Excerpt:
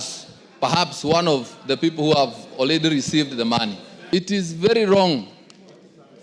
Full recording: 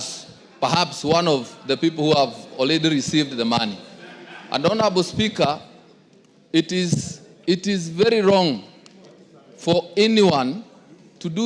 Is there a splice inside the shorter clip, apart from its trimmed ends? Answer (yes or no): yes